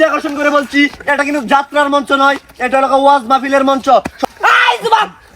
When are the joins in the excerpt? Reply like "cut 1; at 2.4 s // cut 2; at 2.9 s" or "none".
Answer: cut 1; at 4.2 s

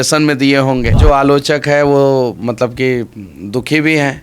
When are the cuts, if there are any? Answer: cut 1; at 1.0 s

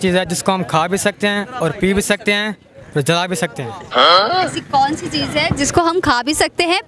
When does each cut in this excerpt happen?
none

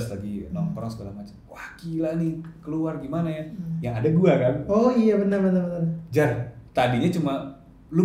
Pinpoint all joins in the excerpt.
none

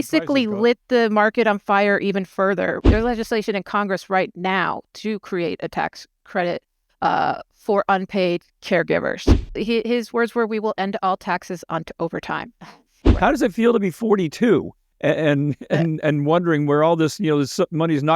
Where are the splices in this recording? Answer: cut 1; at 2.8 s // cut 2; at 9.5 s // cut 3; at 12.9 s

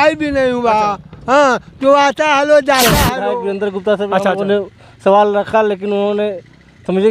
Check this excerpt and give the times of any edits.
cut 1; at 3.2 s

